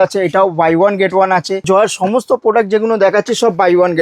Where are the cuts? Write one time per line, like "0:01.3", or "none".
0:01.6

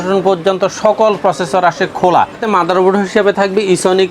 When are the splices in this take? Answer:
0:02.4

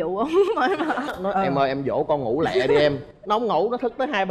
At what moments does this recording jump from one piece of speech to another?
0:01.1

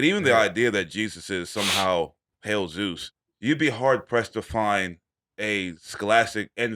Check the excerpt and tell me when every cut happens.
0:03.1

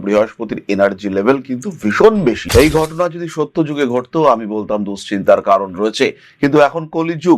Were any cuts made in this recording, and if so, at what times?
0:02.4

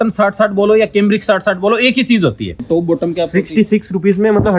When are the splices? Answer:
0:02.6

